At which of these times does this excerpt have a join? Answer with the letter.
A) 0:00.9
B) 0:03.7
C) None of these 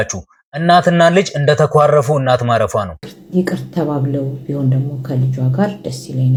C